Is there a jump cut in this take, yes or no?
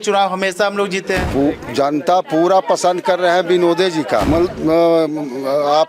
yes